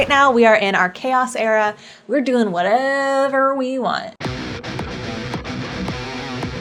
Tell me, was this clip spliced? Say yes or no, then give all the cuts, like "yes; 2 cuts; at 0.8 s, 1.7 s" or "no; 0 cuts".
no; 0 cuts